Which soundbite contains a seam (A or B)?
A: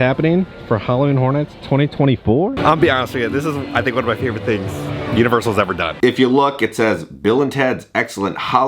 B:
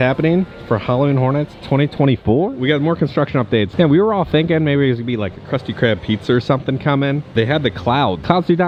A